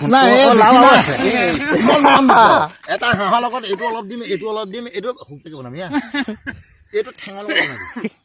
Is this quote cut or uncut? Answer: uncut